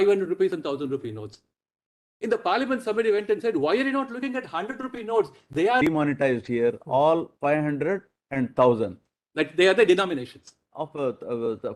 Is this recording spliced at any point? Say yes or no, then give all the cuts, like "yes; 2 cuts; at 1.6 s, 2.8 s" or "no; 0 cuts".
yes; 1 cut; at 5.8 s